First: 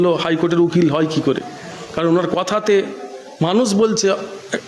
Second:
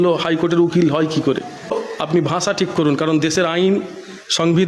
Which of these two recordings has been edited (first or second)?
second